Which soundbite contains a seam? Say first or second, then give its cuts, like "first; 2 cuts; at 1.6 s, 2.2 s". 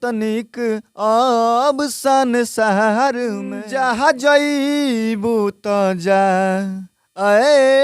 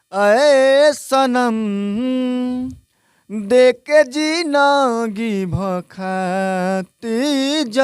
first; 1 cut; at 3.6 s